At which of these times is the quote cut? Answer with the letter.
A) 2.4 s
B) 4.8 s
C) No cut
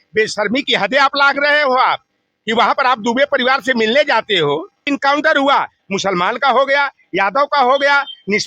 B